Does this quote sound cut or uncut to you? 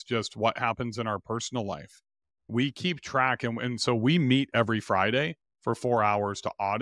uncut